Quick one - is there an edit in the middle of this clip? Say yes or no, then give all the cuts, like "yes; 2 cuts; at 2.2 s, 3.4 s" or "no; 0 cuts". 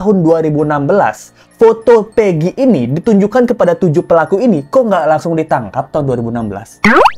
no; 0 cuts